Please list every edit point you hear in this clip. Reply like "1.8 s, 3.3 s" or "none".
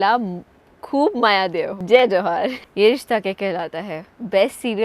1.8 s, 2.6 s